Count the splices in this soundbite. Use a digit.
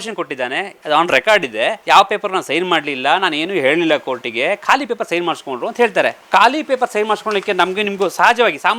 2